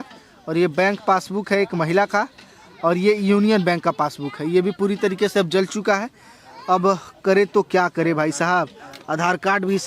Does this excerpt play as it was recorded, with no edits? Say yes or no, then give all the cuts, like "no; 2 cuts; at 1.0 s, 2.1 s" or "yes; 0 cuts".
yes; 0 cuts